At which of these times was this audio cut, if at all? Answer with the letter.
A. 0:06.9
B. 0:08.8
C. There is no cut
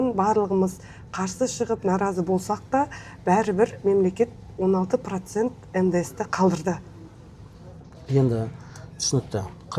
C